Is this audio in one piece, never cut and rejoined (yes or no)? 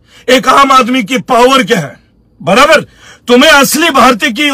yes